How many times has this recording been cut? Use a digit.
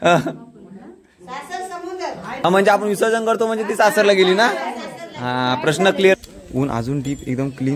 2